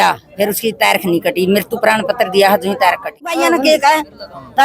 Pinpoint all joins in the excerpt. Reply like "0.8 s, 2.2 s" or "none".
3.2 s